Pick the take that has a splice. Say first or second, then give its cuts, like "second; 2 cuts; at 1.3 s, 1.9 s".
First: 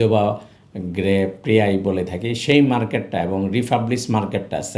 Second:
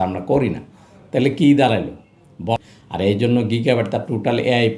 second; 1 cut; at 2.6 s